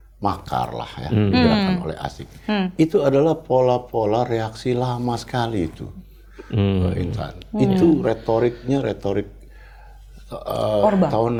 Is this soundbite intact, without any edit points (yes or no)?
yes